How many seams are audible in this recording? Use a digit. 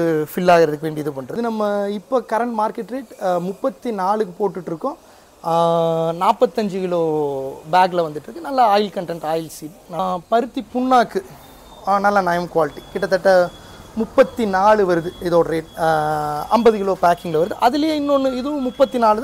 2